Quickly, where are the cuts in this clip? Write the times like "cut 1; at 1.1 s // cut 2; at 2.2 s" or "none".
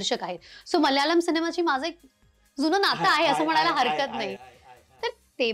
none